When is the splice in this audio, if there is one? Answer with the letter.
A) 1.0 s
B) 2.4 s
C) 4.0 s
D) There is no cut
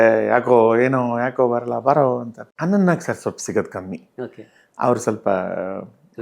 B